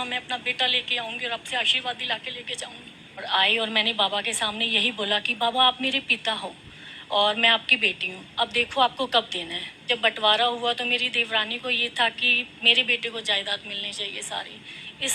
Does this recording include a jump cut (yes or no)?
yes